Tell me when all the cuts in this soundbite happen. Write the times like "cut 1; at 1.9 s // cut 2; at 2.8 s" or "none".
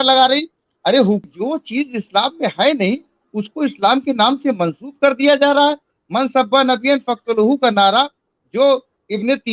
cut 1; at 1.3 s